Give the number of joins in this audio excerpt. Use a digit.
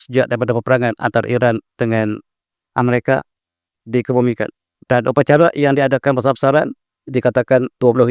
1